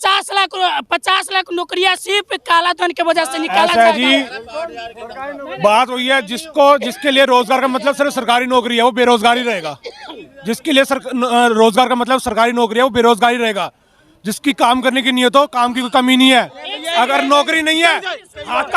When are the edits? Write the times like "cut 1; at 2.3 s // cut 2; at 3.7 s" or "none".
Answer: cut 1; at 3.5 s